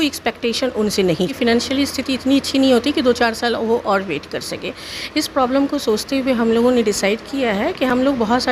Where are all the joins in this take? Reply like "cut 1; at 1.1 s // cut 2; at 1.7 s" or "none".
cut 1; at 1.3 s